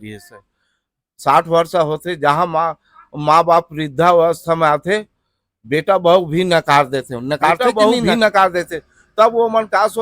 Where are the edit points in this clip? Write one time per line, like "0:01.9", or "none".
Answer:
0:07.7